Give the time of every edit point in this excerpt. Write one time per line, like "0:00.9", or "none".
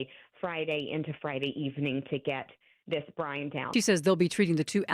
0:03.7